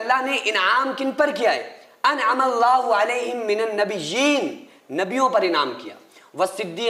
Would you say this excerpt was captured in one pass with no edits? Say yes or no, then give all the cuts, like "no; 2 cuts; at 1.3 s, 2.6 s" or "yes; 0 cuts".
yes; 0 cuts